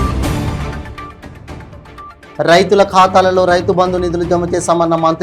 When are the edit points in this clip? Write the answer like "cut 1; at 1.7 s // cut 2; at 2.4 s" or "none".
cut 1; at 1.7 s